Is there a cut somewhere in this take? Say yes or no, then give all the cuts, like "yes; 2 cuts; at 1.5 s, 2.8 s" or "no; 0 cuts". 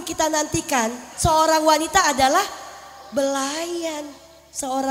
yes; 1 cut; at 1.1 s